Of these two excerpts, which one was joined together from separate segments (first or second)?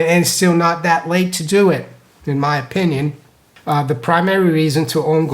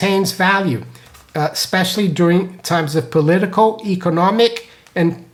first